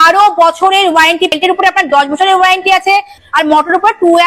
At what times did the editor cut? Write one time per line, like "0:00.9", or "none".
0:01.3
0:03.2

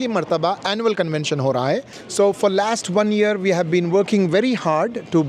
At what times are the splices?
0:02.2

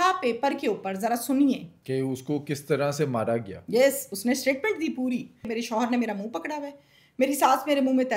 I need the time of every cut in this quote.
0:01.7
0:05.5

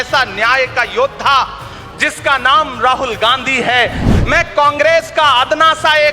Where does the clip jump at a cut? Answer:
0:04.1

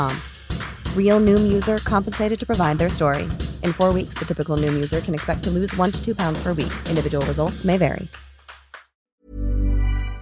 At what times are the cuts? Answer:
0:09.2

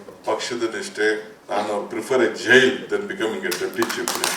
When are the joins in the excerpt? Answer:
0:01.3

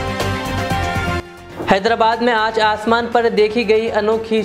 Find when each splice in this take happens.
0:01.2

